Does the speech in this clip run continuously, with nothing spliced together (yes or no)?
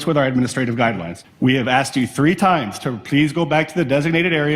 no